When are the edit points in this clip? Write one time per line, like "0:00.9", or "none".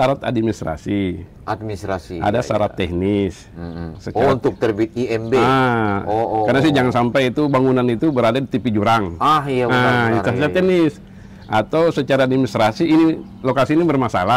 none

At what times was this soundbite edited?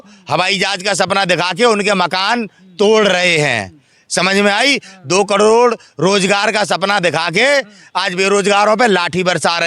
none

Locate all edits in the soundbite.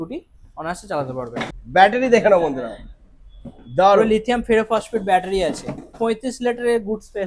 0:01.5
0:06.0

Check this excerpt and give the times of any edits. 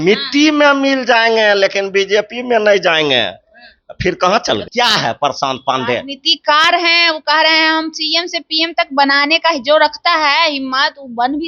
0:04.6

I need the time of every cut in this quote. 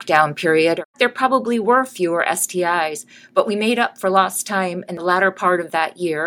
0:00.9
0:04.9

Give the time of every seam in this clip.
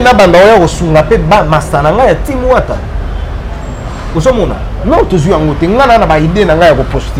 none

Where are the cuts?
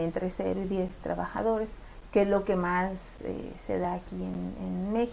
0:03.1

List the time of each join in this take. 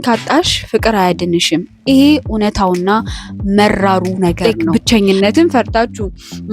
0:04.7

